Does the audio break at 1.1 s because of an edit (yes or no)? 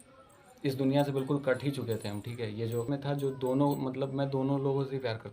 no